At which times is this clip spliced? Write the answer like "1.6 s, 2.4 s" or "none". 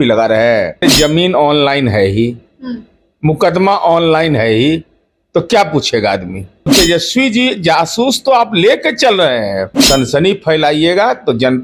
0.9 s, 6.7 s, 9.7 s